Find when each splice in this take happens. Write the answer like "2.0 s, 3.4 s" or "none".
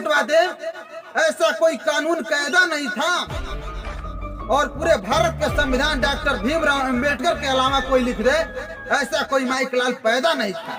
none